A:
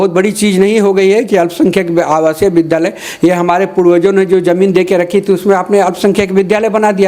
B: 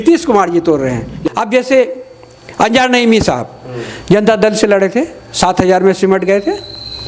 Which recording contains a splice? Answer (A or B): B